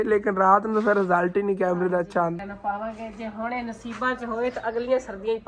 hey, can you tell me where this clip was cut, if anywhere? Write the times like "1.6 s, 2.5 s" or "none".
2.4 s